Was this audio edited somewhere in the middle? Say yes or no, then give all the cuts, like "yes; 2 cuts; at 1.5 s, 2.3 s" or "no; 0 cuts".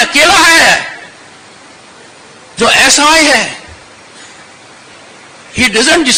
no; 0 cuts